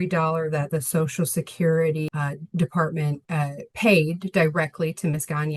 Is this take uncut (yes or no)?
no